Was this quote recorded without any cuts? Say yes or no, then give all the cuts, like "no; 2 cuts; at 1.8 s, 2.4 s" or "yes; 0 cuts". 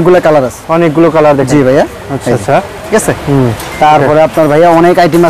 yes; 0 cuts